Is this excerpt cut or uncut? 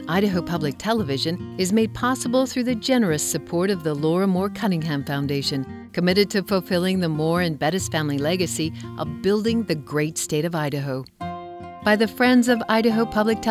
uncut